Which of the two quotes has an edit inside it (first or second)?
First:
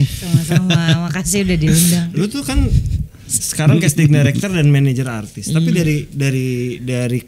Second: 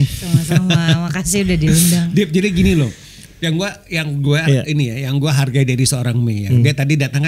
first